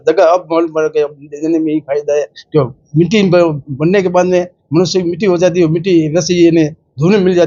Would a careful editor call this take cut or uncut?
uncut